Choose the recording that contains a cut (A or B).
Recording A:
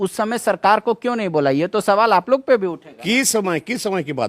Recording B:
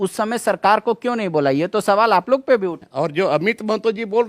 B